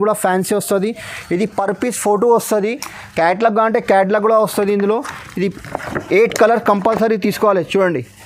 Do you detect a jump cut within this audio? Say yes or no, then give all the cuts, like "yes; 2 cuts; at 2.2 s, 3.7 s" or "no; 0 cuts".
no; 0 cuts